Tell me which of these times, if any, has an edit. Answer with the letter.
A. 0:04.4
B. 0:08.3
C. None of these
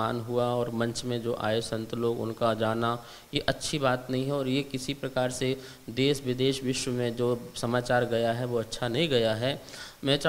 C